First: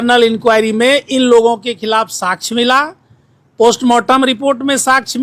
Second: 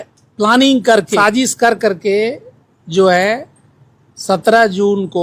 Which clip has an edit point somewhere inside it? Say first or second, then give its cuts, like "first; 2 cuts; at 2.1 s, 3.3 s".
second; 1 cut; at 1.2 s